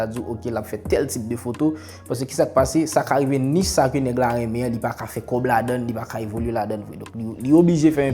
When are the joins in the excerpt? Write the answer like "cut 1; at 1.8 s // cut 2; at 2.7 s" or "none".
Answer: none